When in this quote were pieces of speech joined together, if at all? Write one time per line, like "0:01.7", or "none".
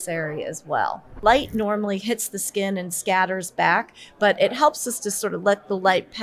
0:01.2

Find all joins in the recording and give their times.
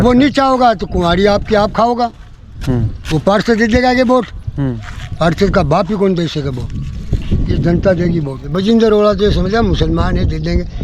0:08.4

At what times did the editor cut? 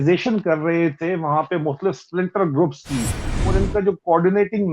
0:03.3

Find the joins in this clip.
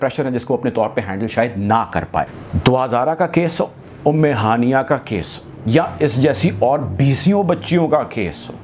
0:02.4

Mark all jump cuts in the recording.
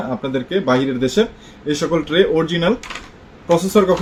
none

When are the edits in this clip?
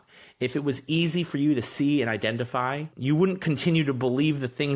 0:02.9

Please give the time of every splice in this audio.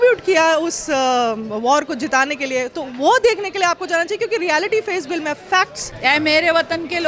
0:05.8

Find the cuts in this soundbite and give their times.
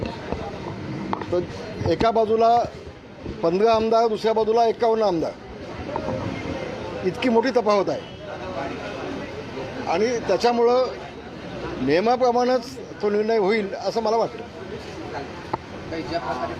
none

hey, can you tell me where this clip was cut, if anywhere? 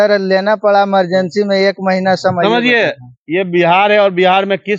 none

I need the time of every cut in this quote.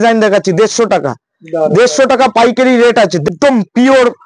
0:03.3

